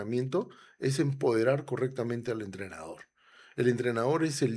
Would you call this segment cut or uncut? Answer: uncut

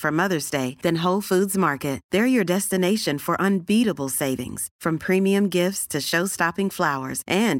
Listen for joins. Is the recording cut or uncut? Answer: uncut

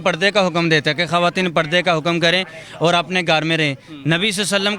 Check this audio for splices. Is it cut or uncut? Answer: uncut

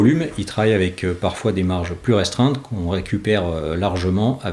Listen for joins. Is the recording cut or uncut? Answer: uncut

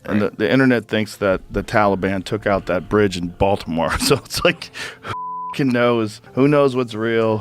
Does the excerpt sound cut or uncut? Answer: cut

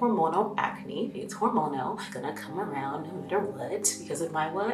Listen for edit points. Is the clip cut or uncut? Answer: uncut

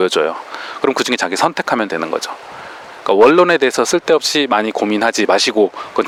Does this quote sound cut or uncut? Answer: uncut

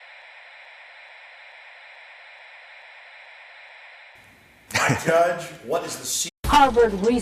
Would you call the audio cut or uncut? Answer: uncut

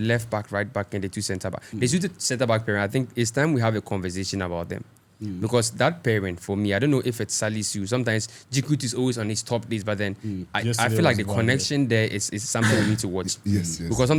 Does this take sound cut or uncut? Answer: uncut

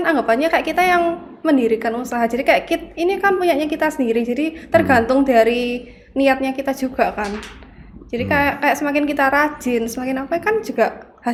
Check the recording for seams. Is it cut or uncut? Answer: uncut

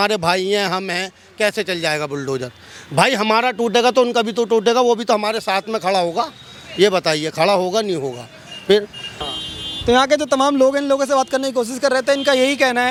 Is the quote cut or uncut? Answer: uncut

